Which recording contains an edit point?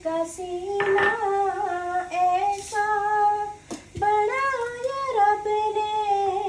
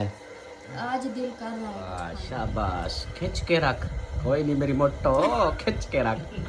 second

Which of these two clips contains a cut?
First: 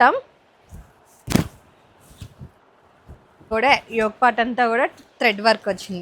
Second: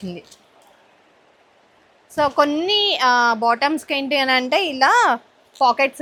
first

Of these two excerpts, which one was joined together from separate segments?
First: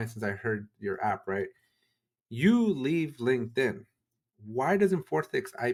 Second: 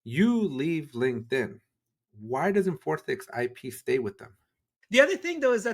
second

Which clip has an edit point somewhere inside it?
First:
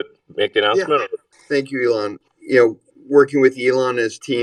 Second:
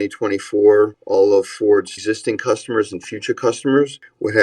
second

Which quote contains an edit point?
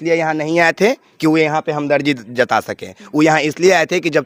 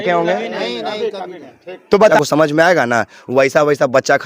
second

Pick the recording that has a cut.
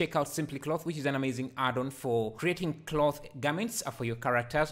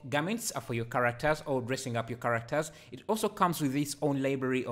first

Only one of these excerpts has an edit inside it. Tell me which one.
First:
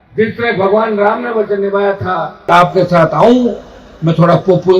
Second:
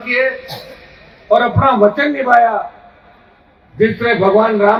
first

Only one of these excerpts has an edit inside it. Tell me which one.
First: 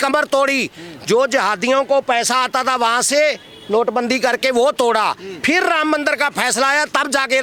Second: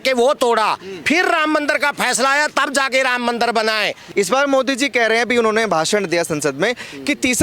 second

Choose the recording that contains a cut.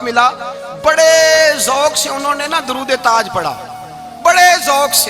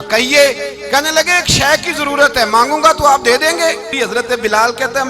second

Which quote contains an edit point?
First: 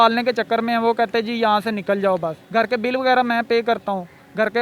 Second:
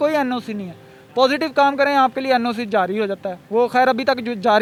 first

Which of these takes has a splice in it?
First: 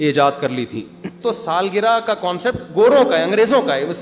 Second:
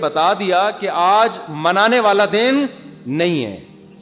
first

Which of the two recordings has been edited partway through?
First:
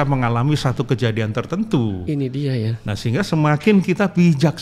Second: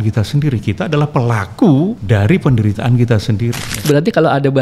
second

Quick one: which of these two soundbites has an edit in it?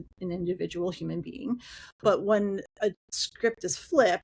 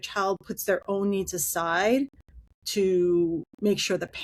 first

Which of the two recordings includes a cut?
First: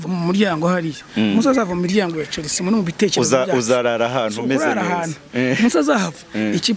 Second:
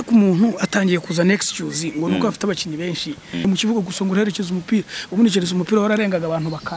second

